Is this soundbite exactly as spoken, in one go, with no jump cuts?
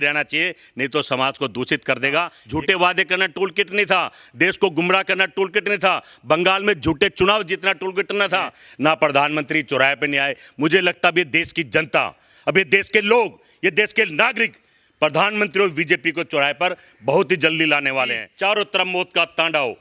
no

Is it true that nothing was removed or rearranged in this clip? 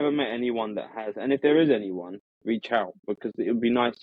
yes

